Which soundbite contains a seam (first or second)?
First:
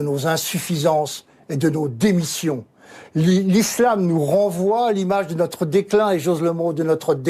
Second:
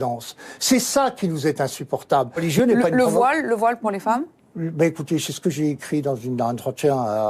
second